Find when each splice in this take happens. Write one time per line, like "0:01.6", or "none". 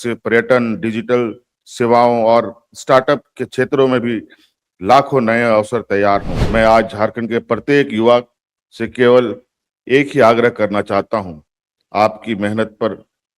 0:06.4